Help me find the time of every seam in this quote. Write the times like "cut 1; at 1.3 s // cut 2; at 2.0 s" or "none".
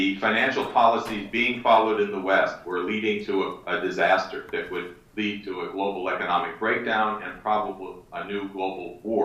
cut 1; at 4.3 s